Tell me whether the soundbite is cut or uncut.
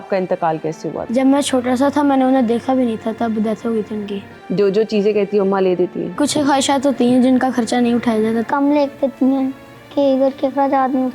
cut